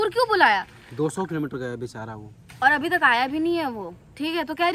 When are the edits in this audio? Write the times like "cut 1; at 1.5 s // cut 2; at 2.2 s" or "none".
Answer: none